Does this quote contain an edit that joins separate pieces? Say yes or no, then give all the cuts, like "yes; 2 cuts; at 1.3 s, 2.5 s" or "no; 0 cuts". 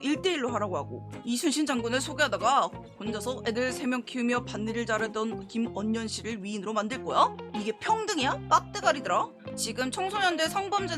yes; 2 cuts; at 1.1 s, 9.5 s